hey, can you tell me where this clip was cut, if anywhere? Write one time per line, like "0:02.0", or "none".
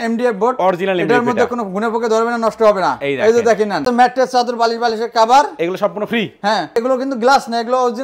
0:03.9
0:06.8